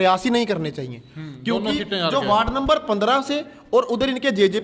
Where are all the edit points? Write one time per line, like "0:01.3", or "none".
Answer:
none